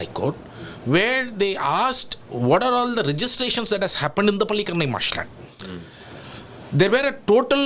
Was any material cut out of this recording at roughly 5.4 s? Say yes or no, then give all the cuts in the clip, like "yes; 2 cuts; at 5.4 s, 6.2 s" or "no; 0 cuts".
no; 0 cuts